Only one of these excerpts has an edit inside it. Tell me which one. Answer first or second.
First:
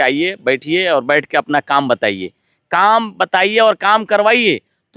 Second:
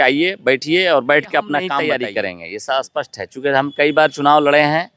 second